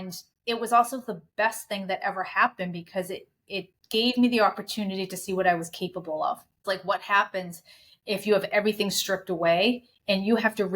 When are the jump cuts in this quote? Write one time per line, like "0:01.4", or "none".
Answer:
0:06.6